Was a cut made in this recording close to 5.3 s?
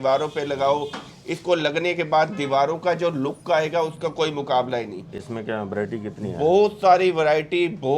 no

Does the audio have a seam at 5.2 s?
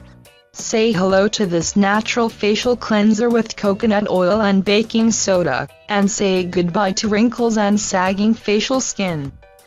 yes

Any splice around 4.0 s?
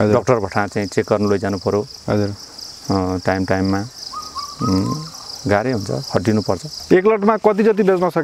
no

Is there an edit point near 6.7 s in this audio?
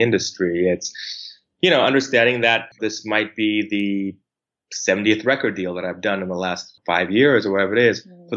yes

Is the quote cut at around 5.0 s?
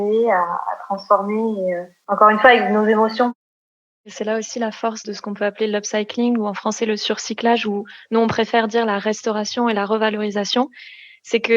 yes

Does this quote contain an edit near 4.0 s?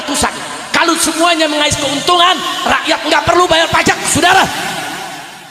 no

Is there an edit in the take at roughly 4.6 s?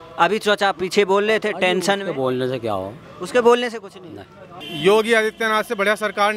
yes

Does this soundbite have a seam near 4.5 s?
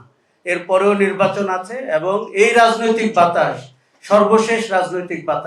no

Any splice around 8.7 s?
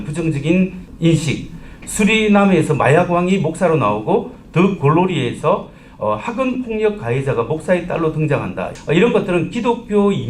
yes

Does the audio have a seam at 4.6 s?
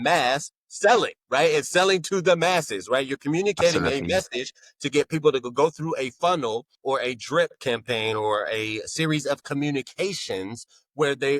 no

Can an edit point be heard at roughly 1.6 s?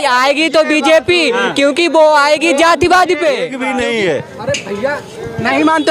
no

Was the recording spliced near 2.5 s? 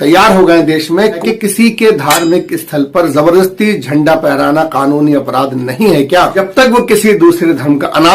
no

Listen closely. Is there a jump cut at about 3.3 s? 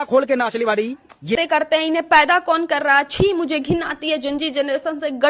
no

